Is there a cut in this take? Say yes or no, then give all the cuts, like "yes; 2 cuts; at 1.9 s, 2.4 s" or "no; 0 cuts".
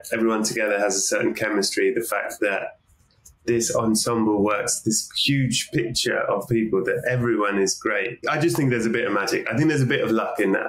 no; 0 cuts